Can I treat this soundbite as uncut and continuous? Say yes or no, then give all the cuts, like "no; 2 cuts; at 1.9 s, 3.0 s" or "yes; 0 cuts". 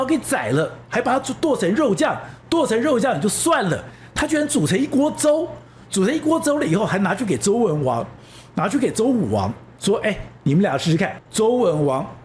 no; 1 cut; at 11.1 s